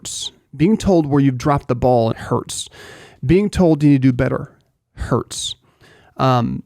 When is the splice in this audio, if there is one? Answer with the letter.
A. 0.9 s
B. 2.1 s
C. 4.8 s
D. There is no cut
B